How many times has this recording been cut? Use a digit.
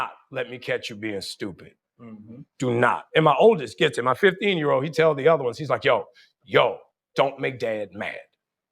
1